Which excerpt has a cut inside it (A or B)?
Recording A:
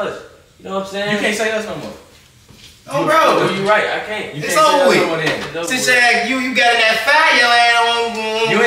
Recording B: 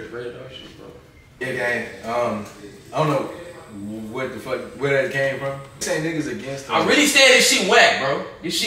B